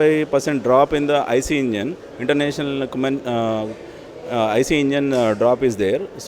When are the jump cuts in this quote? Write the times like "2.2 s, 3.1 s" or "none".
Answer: none

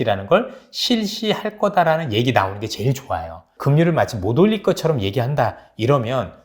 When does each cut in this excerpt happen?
3.5 s

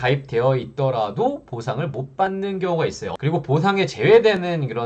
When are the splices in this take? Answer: 3.2 s

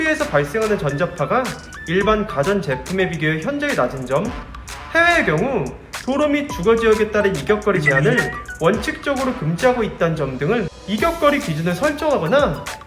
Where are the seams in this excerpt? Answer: 10.7 s

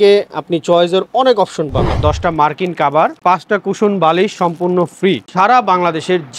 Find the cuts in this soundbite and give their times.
1.9 s, 5.3 s

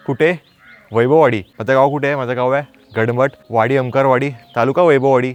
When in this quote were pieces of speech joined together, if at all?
none

